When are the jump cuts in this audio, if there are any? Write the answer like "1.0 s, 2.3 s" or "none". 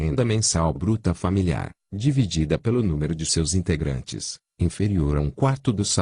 1.4 s

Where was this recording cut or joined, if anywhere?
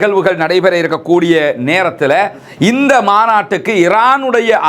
2.5 s

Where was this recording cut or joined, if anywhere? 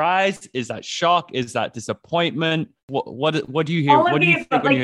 2.9 s

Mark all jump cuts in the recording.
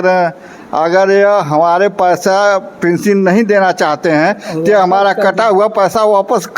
none

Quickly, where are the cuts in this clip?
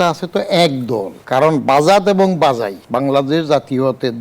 1.2 s, 2.8 s

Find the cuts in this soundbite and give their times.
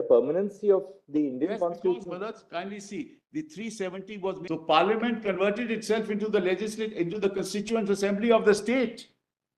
4.4 s

